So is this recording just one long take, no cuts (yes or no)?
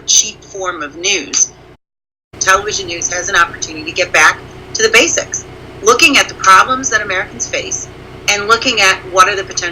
no